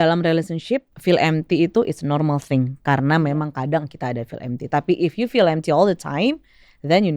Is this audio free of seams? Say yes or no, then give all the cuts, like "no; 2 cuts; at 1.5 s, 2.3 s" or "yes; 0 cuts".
no; 1 cut; at 0.9 s